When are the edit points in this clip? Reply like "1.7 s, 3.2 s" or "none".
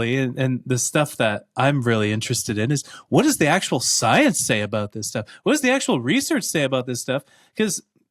none